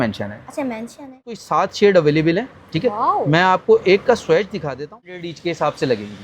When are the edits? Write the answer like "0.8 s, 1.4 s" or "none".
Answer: 1.4 s, 5.3 s